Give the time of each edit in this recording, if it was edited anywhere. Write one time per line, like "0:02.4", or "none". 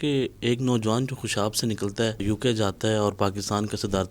0:02.2